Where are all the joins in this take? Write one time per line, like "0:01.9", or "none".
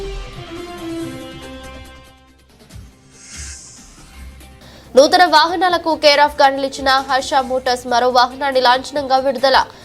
0:00.9